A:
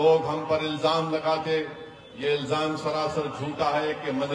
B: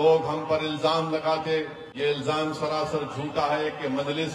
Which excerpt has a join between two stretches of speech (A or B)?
B